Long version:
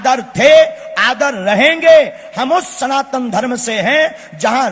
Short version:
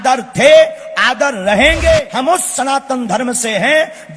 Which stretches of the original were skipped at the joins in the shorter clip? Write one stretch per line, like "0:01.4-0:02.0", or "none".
0:02.1-0:02.3